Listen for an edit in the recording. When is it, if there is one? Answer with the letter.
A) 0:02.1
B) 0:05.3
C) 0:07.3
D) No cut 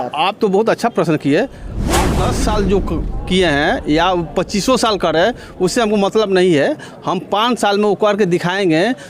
A